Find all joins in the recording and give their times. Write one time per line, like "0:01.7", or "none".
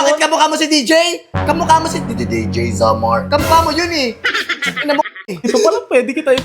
0:05.5